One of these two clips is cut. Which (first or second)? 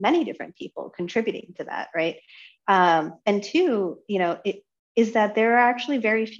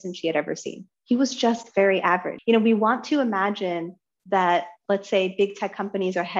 second